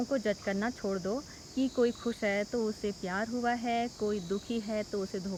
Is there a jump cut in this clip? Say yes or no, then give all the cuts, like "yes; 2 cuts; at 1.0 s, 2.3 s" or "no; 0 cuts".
no; 0 cuts